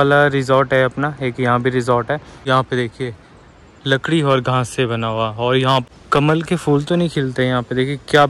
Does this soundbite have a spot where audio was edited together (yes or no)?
yes